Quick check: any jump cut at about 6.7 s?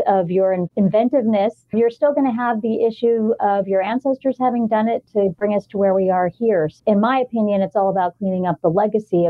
yes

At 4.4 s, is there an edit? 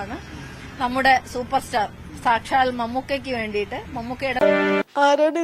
yes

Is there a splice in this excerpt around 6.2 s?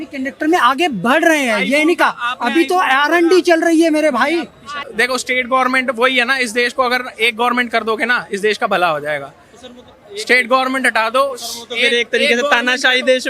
no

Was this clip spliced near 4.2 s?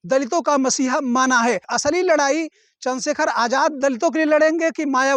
no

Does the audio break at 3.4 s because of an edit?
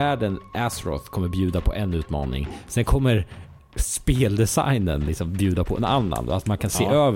no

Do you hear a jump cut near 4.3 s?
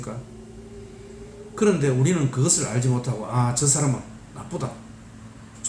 no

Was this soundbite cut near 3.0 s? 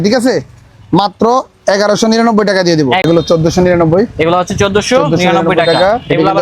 yes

